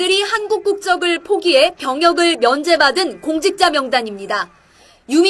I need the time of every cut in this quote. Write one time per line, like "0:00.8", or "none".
0:02.2